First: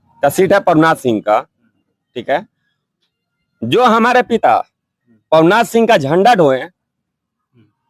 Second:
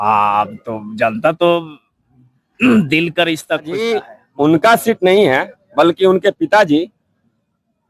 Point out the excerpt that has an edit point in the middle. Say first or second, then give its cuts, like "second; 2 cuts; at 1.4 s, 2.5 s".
second; 1 cut; at 3.9 s